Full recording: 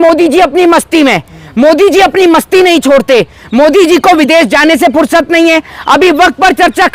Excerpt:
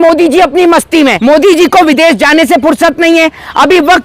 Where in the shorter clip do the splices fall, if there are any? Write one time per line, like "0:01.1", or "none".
0:01.2

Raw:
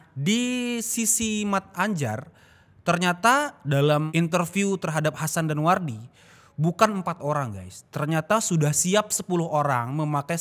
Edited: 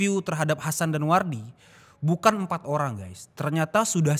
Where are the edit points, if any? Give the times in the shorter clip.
none

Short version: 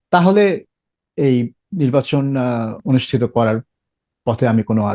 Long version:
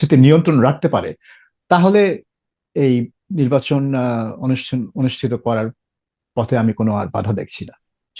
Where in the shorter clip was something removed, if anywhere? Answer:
0:02.8

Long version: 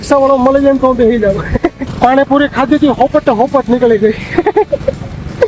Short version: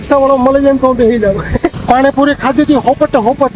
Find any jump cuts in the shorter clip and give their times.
0:01.7

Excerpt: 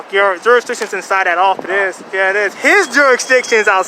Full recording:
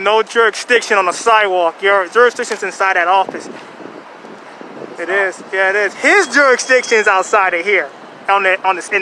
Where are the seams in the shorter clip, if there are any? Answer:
0:01.6

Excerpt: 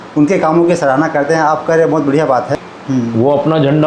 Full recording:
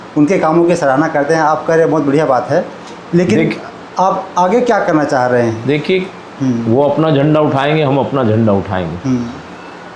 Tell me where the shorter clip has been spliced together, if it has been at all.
0:02.5

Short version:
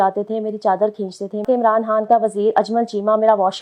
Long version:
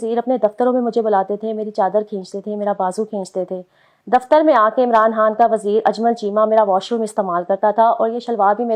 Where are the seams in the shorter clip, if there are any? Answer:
0:01.4

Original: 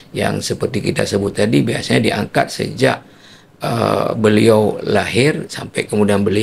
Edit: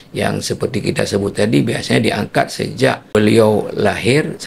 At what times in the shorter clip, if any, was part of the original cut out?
0:03.1

